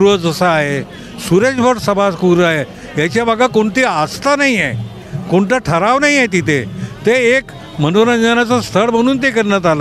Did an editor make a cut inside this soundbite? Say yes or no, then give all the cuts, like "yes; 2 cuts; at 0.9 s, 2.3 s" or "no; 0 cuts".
no; 0 cuts